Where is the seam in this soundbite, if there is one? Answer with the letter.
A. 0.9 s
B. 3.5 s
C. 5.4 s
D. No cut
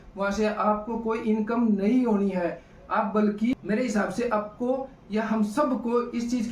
B